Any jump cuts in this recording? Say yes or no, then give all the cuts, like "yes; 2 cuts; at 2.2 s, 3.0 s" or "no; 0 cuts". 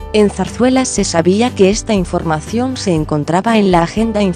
no; 0 cuts